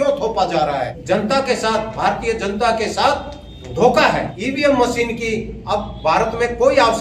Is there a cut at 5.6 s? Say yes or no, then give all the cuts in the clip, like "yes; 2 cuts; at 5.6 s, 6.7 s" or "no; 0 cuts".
no; 2 cuts; at 0.9 s, 4.3 s